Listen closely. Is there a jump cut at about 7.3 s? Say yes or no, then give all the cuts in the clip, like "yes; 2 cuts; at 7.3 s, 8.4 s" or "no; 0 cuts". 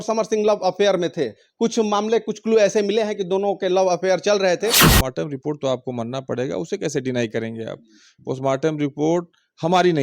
no; 1 cut; at 4.8 s